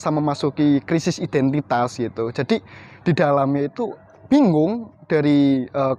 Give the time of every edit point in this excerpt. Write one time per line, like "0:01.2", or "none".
none